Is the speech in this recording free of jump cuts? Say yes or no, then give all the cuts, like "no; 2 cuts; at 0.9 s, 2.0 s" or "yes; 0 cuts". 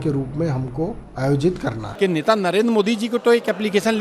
no; 2 cuts; at 1.0 s, 1.8 s